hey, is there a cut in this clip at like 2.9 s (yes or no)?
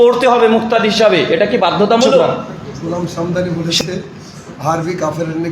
yes